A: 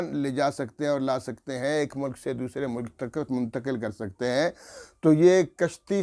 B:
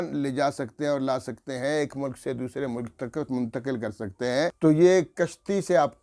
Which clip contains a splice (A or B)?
B